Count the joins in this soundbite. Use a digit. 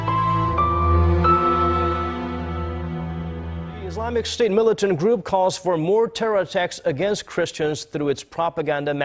1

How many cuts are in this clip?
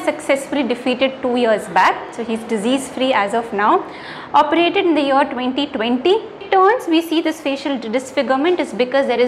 1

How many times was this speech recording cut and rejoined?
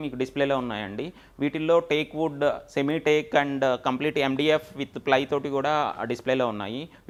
0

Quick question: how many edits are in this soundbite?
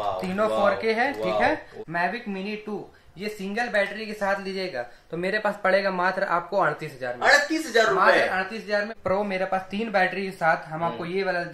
2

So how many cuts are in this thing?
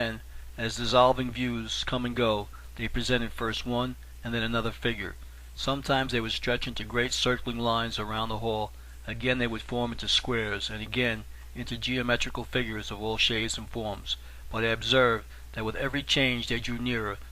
1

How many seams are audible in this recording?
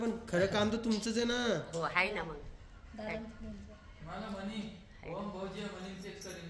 0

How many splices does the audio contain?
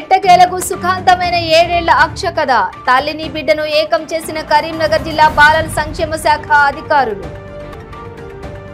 0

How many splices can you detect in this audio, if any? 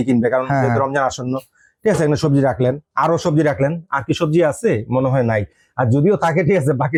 0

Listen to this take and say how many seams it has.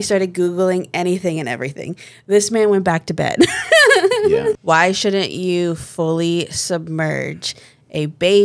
1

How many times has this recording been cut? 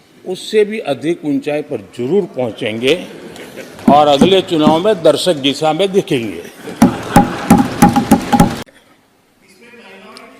0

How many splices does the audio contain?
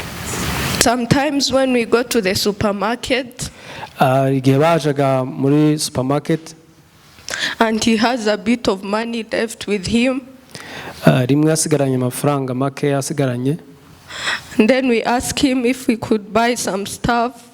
0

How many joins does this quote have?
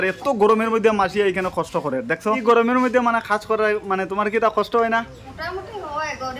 2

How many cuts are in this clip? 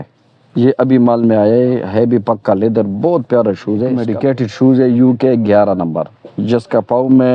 1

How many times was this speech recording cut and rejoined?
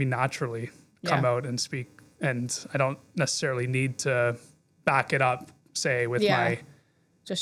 0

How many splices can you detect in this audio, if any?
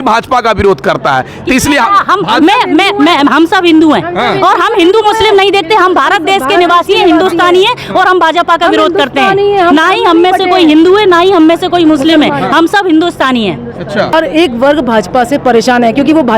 1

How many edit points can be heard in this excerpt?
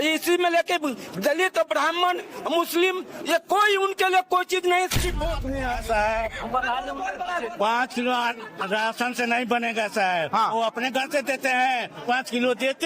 1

